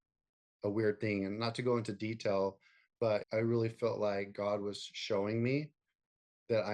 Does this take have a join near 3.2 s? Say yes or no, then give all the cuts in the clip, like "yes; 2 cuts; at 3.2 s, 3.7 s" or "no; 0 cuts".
yes; 1 cut; at 3.2 s